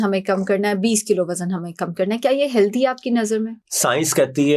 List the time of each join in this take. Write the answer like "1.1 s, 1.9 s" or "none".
none